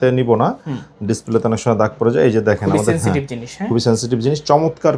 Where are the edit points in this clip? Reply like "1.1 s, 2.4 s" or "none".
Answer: none

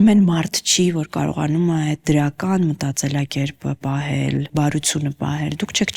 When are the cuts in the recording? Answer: none

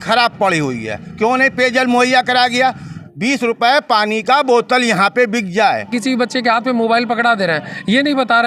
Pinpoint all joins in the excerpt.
3.1 s, 5.9 s

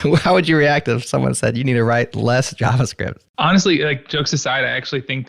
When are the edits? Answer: 3.2 s

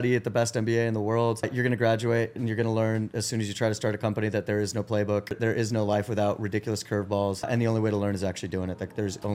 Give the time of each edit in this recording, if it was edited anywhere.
1.5 s, 5.4 s, 7.5 s

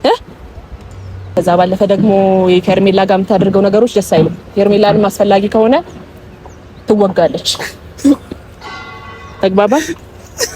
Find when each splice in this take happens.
1.3 s

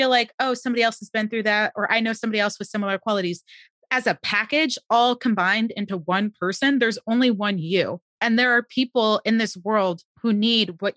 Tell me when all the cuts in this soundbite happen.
8.1 s, 10.1 s

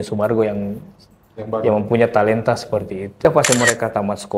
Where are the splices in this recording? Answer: 3.2 s

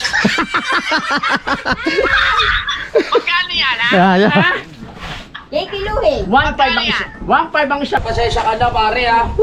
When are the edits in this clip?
8.0 s

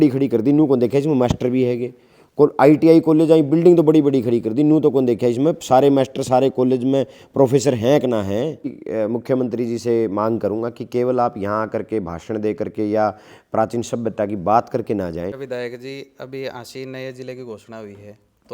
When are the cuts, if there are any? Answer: 8.8 s, 15.4 s

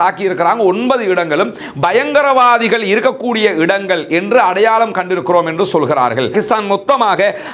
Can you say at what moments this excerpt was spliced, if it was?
6.3 s

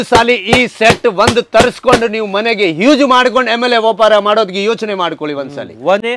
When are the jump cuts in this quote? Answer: none

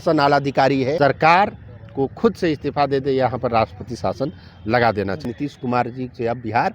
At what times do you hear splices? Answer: 1.0 s, 5.2 s

